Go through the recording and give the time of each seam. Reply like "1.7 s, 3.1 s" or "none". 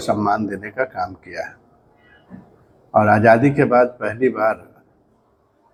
none